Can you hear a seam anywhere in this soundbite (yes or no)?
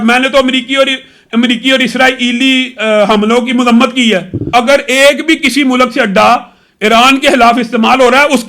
yes